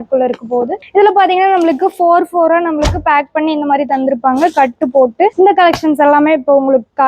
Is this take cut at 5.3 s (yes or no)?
yes